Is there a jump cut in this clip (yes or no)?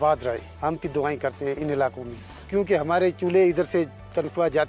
no